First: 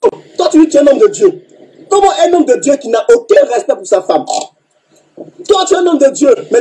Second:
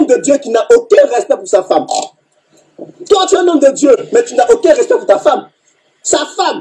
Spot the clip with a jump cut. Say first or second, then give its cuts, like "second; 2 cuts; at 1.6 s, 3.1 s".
second; 1 cut; at 5.6 s